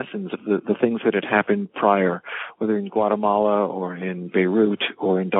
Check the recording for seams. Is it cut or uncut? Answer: uncut